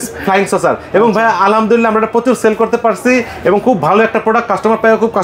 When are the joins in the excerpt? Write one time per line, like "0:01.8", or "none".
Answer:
none